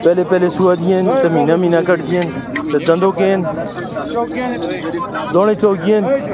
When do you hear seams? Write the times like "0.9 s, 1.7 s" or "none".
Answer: none